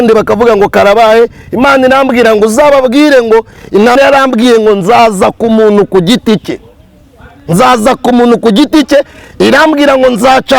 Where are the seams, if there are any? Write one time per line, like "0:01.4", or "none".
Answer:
0:04.0

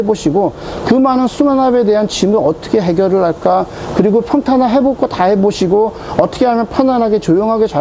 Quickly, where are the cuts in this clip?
none

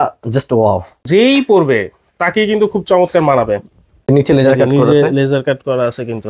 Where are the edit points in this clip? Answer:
0:01.0
0:04.1

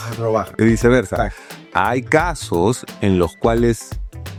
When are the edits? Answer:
none

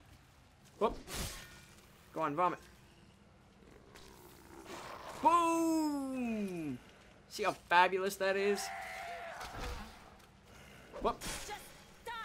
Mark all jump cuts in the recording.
none

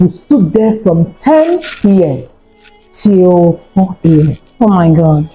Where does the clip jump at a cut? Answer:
none

